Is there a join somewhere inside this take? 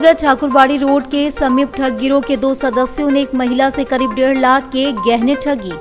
no; 0 cuts

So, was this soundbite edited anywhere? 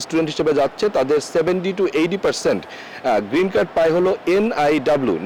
no; 0 cuts

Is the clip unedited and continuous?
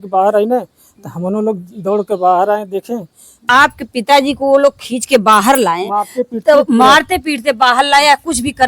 no; 1 cut; at 3.4 s

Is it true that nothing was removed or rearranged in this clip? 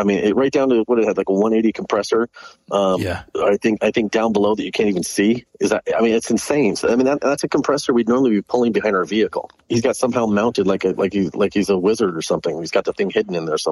no; 1 cut; at 9.6 s

